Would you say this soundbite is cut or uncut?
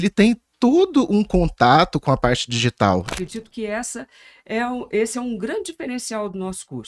cut